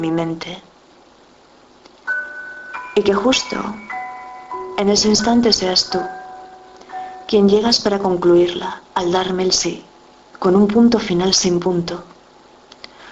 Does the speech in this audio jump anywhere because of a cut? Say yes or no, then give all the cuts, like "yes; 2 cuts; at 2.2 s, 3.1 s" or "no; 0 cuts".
no; 0 cuts